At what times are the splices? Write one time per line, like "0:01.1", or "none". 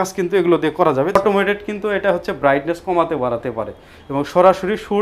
0:01.2